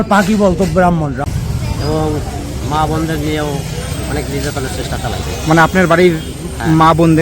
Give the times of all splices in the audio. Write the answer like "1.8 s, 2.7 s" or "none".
1.2 s

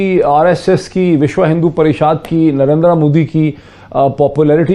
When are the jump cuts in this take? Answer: none

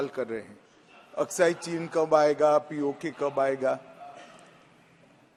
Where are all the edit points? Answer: none

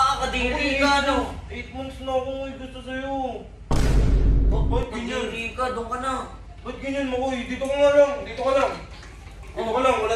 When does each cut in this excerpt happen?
3.5 s, 4.6 s

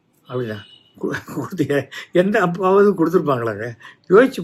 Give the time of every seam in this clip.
none

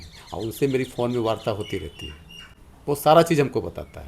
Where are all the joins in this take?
none

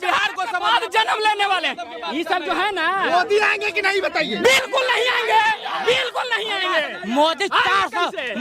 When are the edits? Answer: none

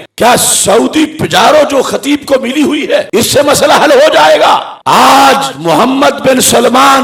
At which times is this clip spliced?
none

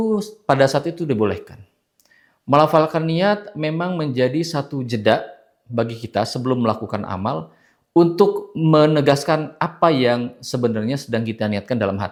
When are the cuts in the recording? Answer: none

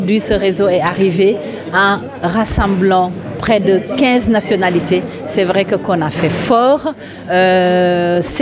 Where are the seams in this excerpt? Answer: none

